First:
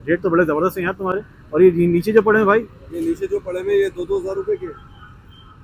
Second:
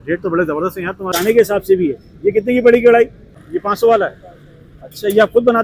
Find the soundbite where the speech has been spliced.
second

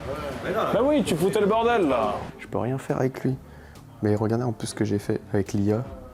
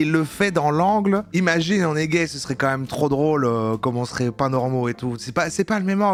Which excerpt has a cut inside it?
first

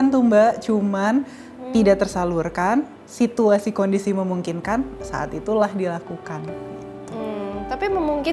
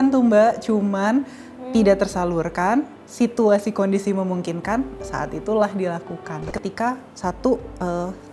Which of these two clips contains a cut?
second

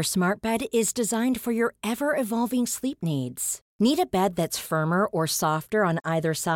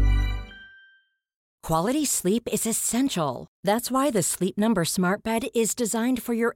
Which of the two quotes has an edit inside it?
second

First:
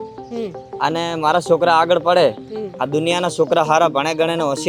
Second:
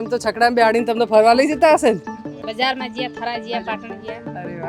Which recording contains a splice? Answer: second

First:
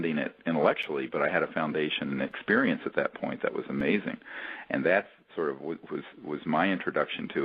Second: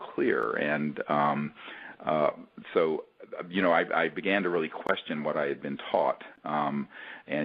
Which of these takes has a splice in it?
first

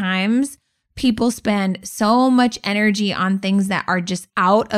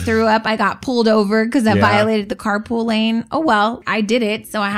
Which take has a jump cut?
second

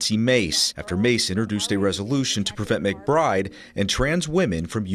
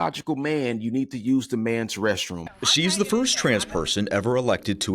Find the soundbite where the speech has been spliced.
second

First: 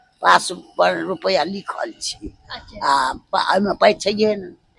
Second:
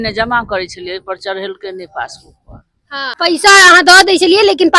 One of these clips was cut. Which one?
second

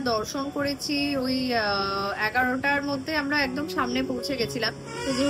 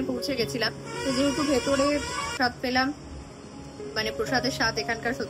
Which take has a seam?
second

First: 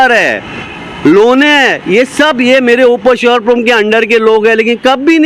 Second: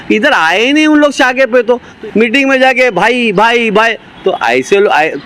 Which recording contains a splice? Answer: second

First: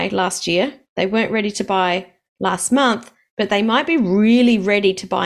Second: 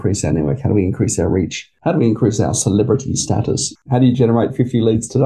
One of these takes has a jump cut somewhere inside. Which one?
second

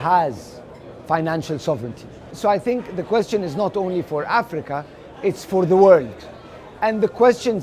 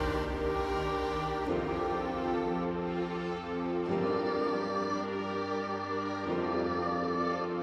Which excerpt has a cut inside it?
first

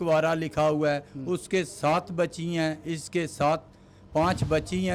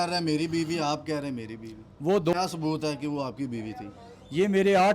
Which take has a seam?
second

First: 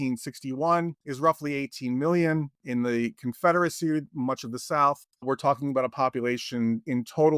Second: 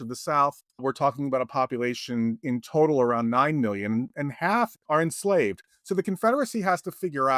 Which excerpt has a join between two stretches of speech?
first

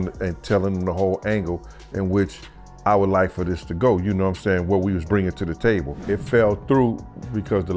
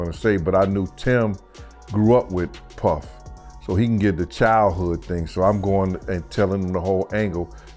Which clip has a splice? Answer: first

